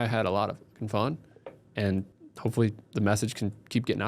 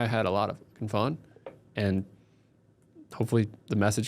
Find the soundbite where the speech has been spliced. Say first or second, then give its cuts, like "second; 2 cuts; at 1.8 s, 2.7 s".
first; 1 cut; at 2.2 s